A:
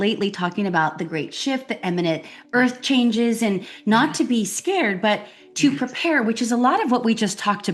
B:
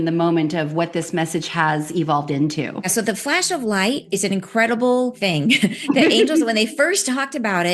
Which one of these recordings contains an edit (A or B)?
B